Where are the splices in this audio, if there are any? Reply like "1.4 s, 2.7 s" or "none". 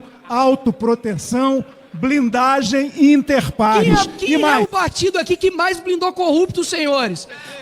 4.5 s